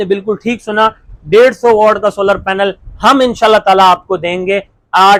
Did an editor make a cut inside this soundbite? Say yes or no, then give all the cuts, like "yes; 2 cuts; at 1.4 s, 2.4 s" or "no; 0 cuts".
no; 0 cuts